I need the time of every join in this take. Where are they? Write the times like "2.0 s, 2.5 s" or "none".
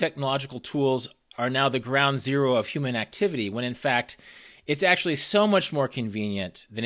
none